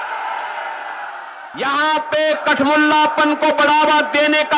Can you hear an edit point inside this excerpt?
yes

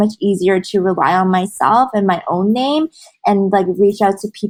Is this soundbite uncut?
yes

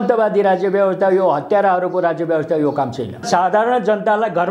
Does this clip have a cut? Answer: yes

